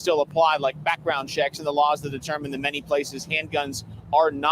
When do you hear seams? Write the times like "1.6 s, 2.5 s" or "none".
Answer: 2.8 s